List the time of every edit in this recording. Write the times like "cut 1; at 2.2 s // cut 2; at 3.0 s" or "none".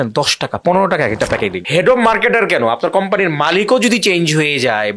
cut 1; at 1.6 s